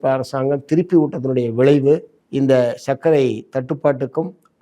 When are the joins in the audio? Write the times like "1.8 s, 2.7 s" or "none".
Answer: 2.2 s